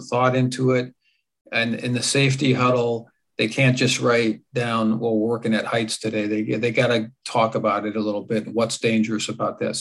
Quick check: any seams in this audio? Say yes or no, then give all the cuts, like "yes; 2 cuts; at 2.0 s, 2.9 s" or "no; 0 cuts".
no; 0 cuts